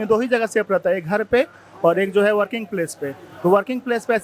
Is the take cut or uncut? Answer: uncut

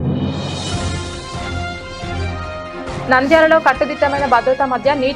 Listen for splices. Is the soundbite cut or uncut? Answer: cut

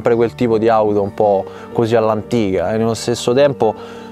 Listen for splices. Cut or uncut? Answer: uncut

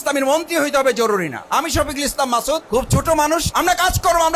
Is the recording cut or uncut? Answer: cut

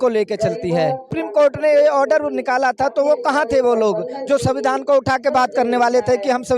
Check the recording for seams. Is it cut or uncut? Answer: cut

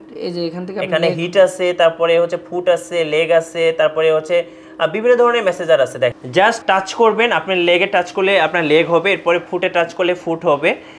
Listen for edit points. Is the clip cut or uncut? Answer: cut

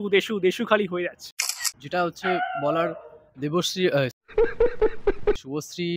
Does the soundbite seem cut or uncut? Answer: uncut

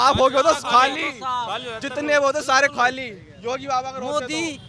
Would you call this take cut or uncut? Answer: uncut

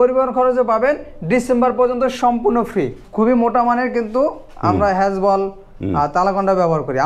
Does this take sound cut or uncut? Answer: cut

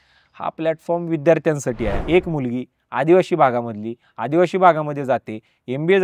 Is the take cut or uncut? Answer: cut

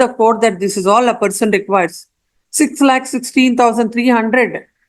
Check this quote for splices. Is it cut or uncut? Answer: uncut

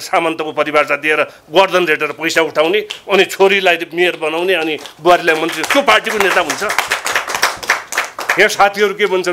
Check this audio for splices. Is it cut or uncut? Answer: uncut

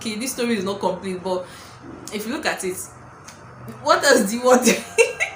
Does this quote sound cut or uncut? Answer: uncut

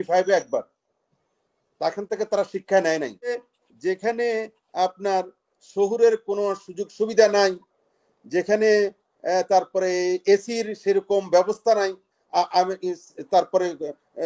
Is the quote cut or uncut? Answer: cut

